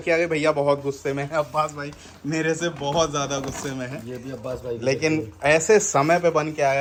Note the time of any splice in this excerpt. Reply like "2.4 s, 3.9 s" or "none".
none